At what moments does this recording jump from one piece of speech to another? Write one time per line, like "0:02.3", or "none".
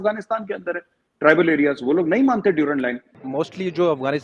0:03.1